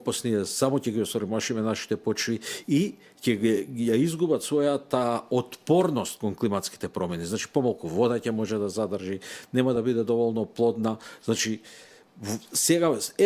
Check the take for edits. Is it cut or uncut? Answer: uncut